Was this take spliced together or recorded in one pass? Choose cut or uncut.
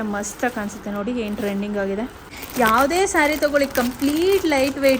cut